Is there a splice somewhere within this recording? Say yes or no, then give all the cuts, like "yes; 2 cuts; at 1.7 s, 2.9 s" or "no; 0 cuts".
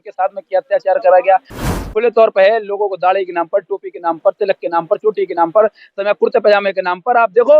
yes; 1 cut; at 1.7 s